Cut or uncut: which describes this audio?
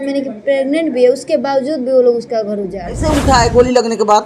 cut